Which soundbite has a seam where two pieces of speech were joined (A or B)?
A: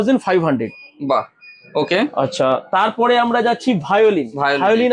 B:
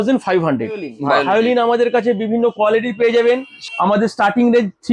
B